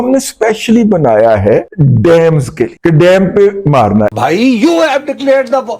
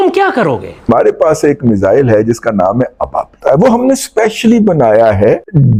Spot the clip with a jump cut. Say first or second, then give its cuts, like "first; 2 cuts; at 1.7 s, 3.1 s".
first; 1 cut; at 4.1 s